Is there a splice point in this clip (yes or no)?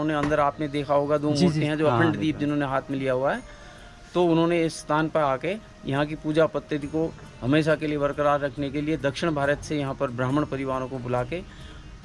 no